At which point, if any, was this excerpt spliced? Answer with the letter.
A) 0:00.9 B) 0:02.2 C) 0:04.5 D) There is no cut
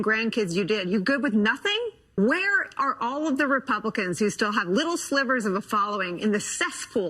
B